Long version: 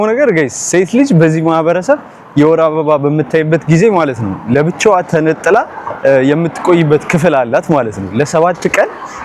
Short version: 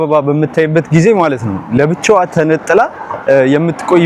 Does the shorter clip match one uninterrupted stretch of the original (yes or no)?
yes